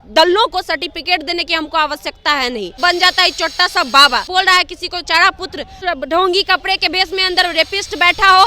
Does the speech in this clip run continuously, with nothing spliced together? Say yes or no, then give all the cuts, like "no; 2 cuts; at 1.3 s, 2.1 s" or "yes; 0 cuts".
no; 3 cuts; at 2.8 s, 4.3 s, 5.8 s